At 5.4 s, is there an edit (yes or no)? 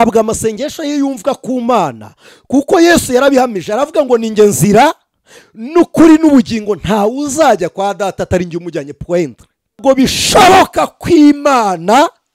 no